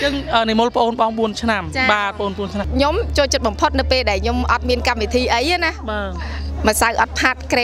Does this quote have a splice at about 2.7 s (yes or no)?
yes